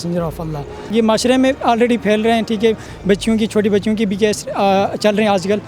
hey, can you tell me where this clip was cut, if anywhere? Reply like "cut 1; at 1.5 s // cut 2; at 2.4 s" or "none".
cut 1; at 0.9 s